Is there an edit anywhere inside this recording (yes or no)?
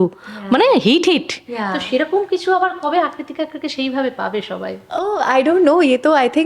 no